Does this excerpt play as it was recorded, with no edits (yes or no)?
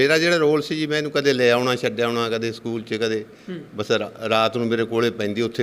yes